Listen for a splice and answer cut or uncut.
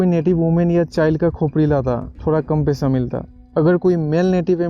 uncut